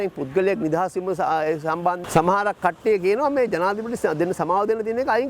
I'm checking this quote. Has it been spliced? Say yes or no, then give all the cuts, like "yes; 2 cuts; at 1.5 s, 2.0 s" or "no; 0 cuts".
yes; 1 cut; at 2.0 s